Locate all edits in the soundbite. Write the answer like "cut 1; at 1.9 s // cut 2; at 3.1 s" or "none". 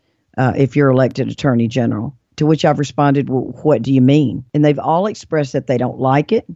none